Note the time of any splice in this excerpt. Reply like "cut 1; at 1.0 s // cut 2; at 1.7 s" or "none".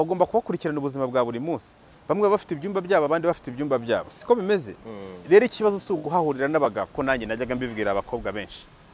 cut 1; at 6.9 s